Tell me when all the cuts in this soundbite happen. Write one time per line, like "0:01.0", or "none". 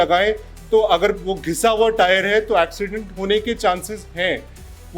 none